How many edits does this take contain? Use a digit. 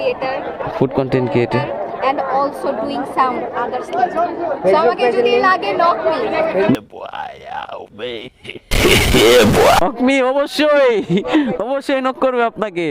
2